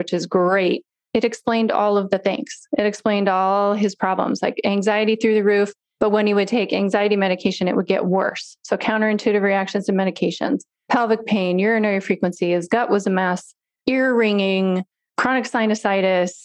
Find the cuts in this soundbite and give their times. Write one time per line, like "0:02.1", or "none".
0:01.0